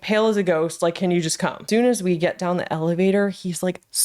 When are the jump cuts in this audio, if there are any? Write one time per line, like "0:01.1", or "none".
0:01.6